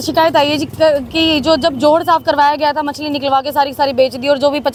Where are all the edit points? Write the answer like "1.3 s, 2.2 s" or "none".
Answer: none